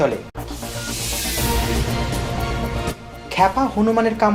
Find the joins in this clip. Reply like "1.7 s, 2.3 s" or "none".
none